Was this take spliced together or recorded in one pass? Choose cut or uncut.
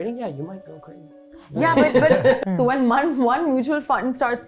cut